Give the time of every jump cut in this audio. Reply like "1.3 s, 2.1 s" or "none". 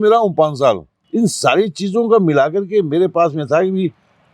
0.9 s